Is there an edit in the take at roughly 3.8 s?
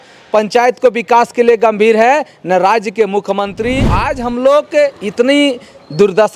yes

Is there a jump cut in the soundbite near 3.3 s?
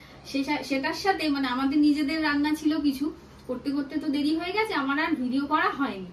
no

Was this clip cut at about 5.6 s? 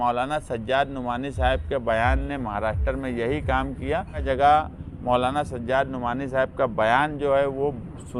no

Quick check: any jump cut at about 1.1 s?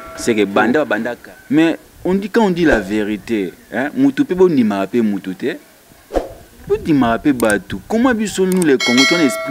yes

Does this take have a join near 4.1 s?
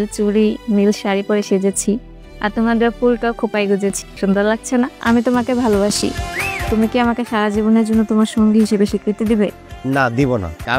yes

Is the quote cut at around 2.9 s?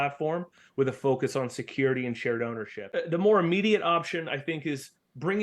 yes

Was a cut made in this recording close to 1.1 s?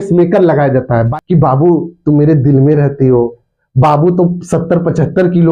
yes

